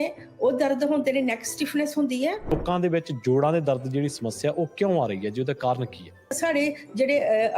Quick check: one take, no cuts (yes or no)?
no